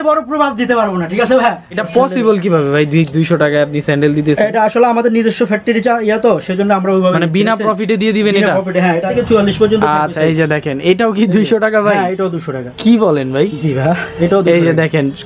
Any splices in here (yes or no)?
yes